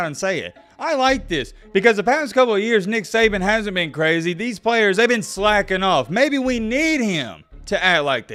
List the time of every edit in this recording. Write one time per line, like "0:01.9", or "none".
none